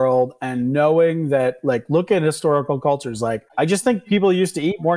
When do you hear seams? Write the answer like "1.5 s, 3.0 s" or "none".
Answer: 3.5 s